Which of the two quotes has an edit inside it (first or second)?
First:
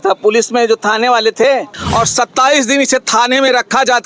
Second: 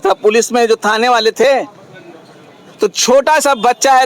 first